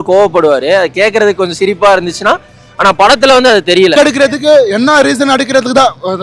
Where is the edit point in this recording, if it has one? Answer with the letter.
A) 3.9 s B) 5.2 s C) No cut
A